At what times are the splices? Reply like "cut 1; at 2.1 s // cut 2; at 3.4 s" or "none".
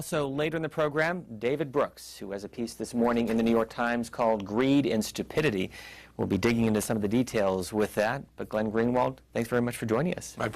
none